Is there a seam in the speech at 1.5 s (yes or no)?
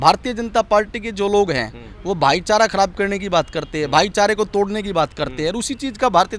no